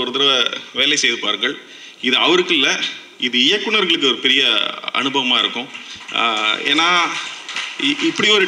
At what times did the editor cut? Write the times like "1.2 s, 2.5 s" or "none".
none